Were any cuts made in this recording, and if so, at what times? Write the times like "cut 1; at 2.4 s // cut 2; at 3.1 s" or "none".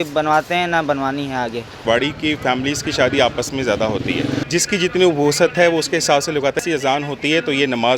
cut 1; at 1.8 s // cut 2; at 4.4 s // cut 3; at 6.6 s